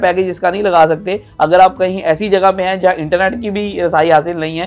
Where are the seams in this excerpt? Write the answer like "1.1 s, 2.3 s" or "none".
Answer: none